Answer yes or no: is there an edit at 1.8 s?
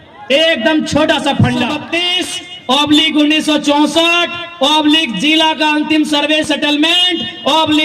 yes